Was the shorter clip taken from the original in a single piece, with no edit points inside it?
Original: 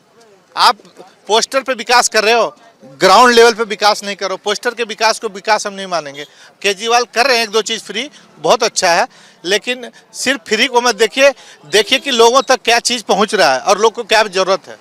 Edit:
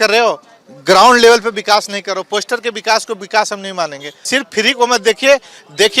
no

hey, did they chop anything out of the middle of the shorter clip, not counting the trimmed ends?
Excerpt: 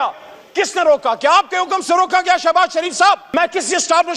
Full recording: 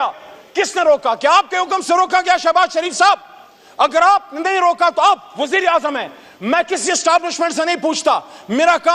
yes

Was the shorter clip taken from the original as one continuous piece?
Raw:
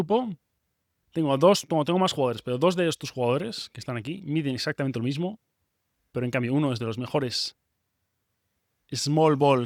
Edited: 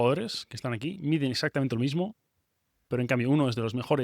yes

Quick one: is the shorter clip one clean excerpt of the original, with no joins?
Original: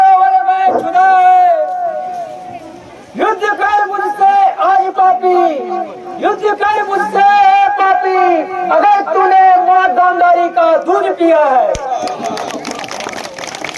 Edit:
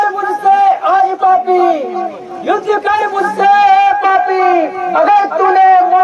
yes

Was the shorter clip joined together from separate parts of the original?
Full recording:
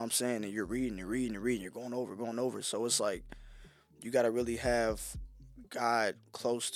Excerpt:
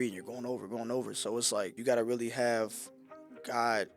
yes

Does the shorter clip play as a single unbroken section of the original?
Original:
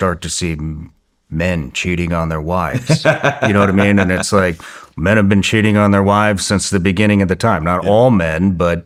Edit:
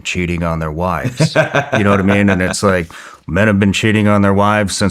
yes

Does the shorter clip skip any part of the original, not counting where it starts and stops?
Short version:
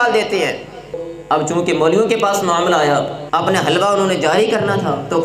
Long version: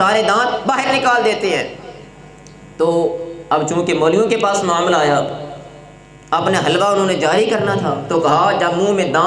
yes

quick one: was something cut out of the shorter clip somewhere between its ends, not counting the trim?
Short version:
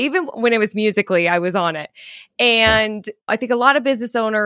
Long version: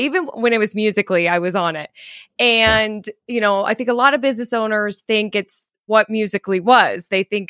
yes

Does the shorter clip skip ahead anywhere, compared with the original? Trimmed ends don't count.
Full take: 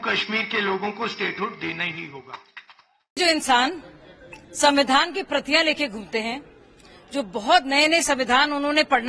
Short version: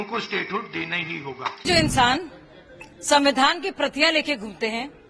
yes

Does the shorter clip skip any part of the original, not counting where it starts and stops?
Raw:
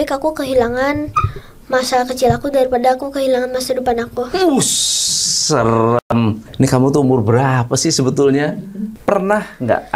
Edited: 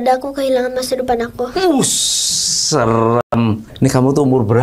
no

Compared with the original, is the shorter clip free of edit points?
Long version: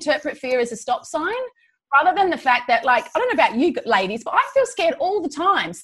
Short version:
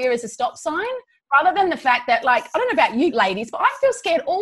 no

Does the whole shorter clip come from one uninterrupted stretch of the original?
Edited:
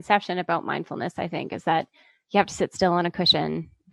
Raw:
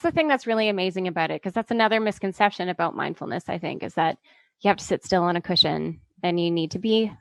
yes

